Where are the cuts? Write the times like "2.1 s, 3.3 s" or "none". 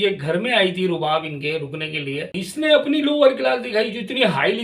2.3 s